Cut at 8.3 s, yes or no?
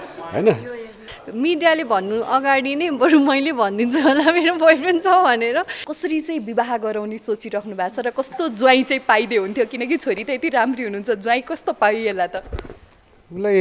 no